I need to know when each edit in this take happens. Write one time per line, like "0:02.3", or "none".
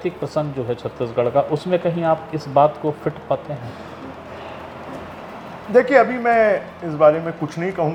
none